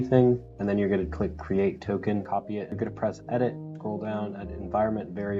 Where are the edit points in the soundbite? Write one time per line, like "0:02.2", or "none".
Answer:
0:02.4
0:03.7